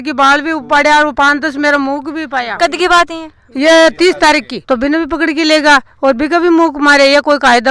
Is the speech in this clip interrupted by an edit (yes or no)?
yes